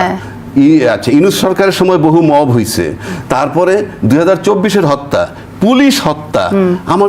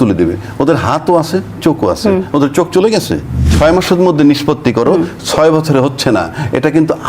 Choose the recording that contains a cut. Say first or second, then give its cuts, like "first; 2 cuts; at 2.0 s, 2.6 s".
second; 1 cut; at 3.4 s